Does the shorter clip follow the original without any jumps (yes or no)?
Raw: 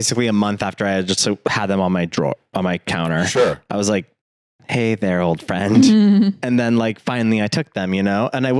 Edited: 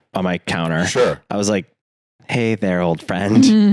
yes